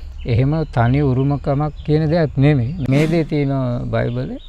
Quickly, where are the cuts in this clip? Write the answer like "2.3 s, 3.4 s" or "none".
2.8 s

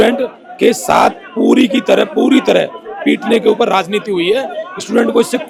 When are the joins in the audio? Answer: none

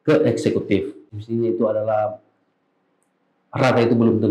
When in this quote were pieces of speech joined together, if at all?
1.1 s

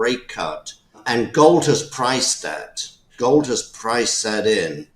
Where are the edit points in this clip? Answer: 1.0 s, 3.1 s

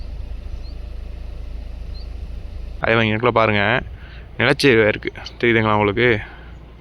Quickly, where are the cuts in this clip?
2.8 s

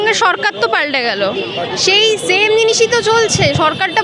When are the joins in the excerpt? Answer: none

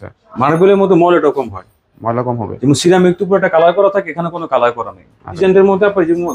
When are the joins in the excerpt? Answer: 5.4 s

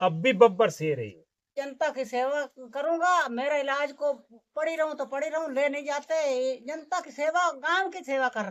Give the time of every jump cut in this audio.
1.5 s

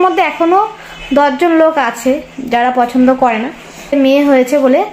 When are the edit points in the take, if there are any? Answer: 3.9 s

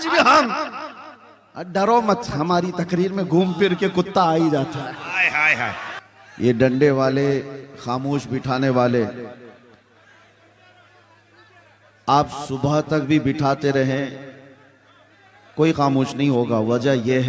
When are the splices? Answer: 5.9 s

